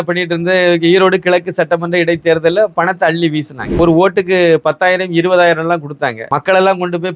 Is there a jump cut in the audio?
yes; 2 cuts; at 3.8 s, 6.2 s

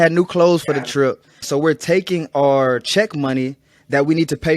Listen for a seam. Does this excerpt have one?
yes; 1 cut; at 1.4 s

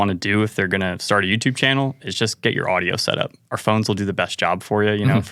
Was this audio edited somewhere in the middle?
no; 0 cuts

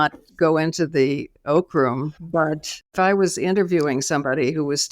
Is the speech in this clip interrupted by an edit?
yes; 1 cut; at 2.8 s

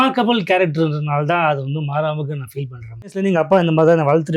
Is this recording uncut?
no; 1 cut; at 3.2 s

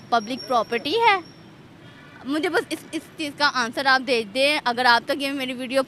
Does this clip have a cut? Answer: no; 0 cuts

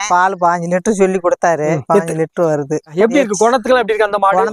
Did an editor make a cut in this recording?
no; 0 cuts

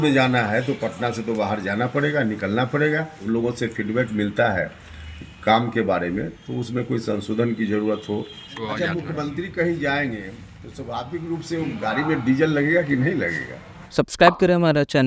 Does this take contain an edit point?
yes; 3 cuts; at 3.1 s, 8.6 s, 13.9 s

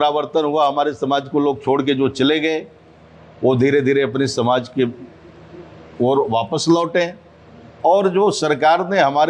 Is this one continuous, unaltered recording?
yes; 0 cuts

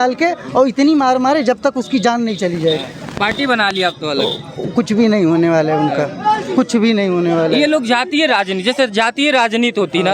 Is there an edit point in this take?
no; 0 cuts

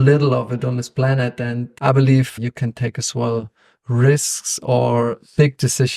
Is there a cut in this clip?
yes; 2 cuts; at 1.7 s, 2.3 s

